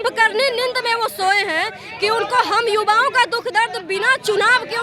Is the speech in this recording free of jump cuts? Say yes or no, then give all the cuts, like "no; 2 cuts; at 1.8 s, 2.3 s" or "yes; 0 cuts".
yes; 0 cuts